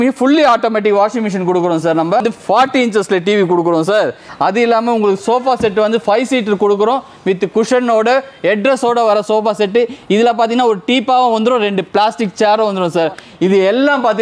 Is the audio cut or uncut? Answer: cut